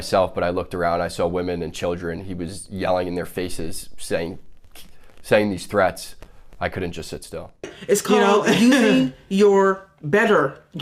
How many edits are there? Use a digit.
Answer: 1